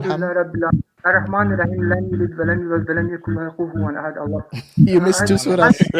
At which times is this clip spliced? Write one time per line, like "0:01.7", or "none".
0:01.0